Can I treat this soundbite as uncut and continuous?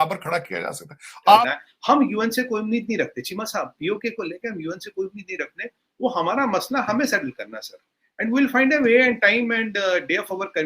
no; 1 cut; at 1.4 s

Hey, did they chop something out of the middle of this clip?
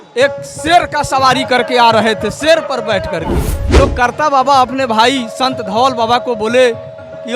yes; 1 cut; at 3.6 s

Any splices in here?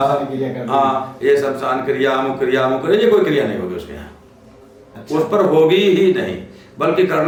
no; 0 cuts

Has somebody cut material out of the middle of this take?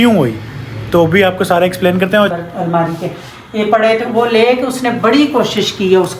yes; 1 cut; at 2.3 s

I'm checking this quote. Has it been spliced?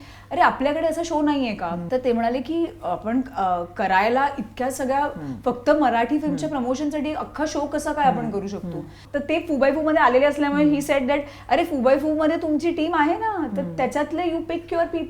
yes; 2 cuts; at 1.8 s, 9.0 s

